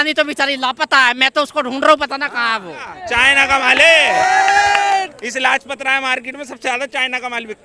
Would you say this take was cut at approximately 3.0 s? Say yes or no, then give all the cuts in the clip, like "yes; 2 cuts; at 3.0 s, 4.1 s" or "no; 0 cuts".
yes; 1 cut; at 3.0 s